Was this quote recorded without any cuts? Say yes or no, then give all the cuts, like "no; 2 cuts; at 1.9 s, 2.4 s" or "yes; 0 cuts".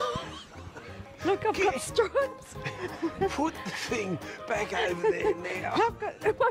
yes; 0 cuts